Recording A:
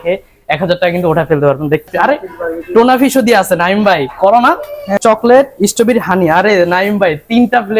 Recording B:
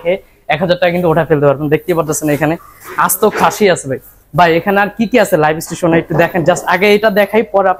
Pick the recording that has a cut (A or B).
A